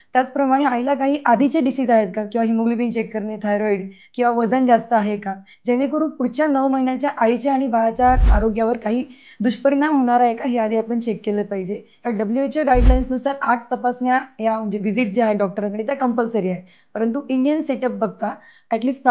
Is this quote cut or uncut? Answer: cut